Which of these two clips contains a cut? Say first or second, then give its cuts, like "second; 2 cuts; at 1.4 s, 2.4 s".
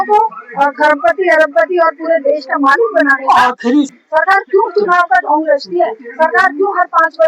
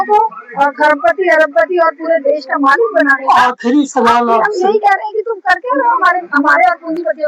first; 1 cut; at 3.9 s